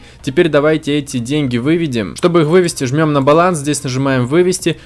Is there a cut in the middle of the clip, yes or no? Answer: no